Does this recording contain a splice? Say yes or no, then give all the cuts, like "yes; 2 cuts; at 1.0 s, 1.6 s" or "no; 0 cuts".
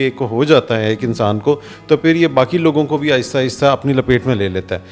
no; 0 cuts